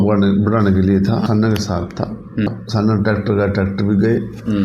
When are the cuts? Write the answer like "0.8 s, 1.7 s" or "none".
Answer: 1.2 s, 2.5 s